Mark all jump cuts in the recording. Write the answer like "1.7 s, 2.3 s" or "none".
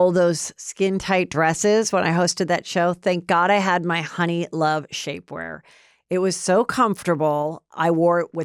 none